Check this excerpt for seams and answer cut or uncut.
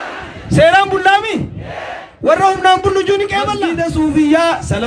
cut